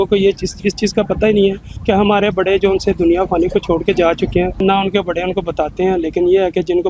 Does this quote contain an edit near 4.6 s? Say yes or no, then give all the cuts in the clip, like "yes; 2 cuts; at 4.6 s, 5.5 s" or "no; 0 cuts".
yes; 2 cuts; at 1.7 s, 4.6 s